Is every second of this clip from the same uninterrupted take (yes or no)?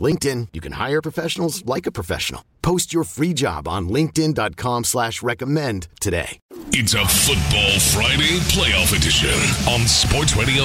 no